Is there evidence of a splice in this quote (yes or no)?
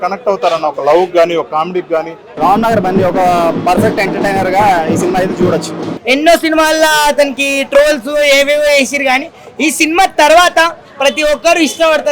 yes